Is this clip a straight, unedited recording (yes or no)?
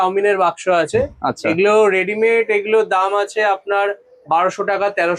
yes